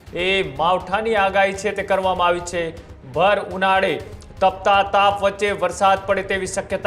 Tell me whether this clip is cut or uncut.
uncut